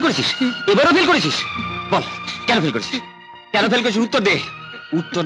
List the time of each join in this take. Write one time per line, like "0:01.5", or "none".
none

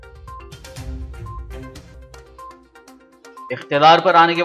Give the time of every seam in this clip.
0:01.9

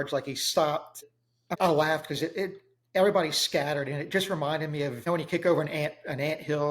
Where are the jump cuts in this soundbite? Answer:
0:01.5
0:05.0

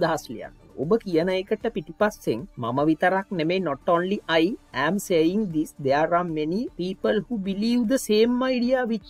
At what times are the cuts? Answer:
0:02.5
0:06.7

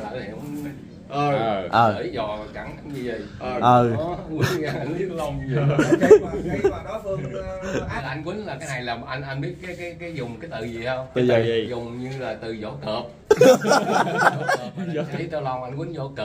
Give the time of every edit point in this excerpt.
0:08.0
0:15.1

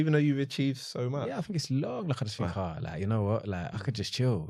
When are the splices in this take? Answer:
none

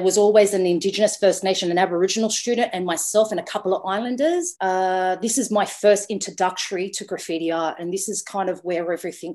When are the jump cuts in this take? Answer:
0:04.5

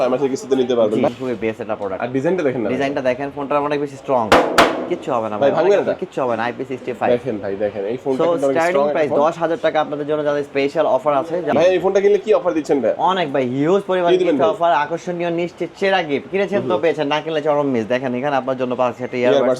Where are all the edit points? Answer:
0:01.1
0:11.5

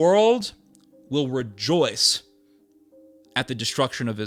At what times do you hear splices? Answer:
none

